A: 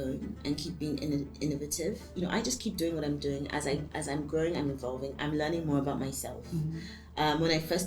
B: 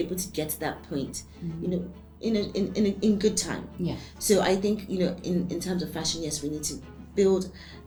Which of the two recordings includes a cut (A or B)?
A